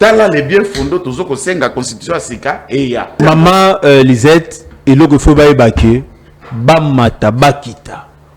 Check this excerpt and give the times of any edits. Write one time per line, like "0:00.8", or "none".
0:03.2